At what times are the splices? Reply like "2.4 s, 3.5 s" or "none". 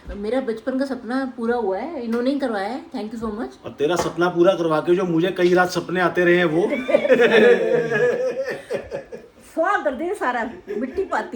none